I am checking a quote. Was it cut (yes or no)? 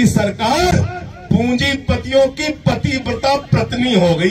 no